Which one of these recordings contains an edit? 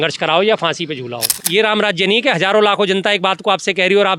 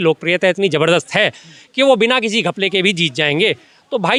first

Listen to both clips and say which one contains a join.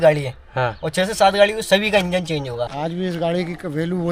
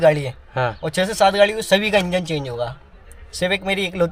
first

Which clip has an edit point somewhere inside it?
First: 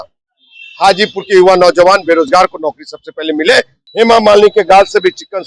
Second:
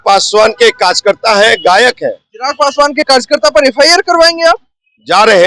first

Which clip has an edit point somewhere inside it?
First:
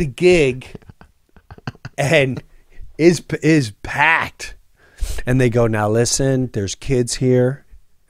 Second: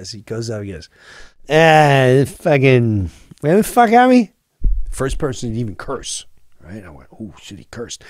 second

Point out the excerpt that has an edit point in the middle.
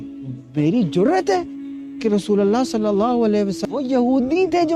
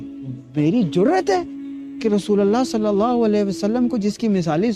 first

